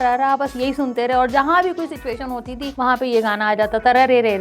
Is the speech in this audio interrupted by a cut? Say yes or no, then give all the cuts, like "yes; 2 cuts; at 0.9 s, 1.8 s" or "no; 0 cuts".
yes; 1 cut; at 2.6 s